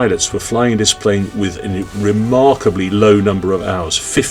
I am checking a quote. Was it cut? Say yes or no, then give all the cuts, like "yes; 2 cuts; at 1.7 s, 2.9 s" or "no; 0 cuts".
no; 0 cuts